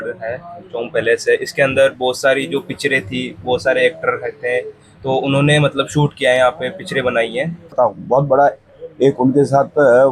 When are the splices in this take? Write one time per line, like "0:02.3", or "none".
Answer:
0:07.7